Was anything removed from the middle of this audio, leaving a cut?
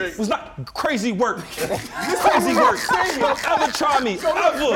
no; 0 cuts

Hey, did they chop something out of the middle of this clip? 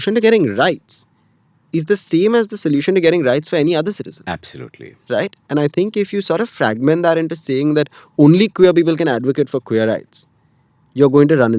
no; 0 cuts

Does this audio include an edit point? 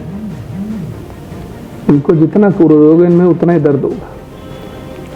no; 0 cuts

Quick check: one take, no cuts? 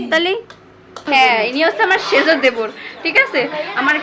no; 1 cut; at 1.0 s

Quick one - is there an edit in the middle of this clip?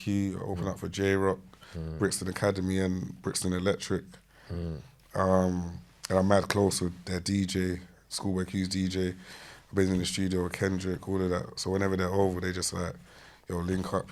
no; 0 cuts

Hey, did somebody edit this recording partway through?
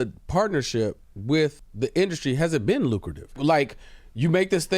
yes; 2 cuts; at 1.6 s, 3.4 s

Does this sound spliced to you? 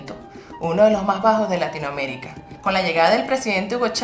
yes; 1 cut; at 1.6 s

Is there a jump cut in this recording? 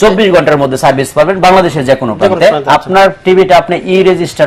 no; 0 cuts

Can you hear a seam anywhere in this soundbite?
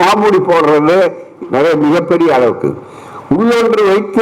yes; 1 cut; at 1.3 s

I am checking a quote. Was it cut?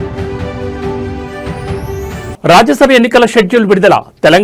yes; 1 cut; at 2.3 s

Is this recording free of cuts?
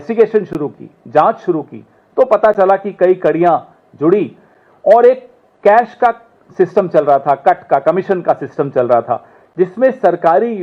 yes; 0 cuts

